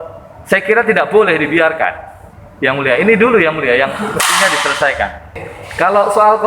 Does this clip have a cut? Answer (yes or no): no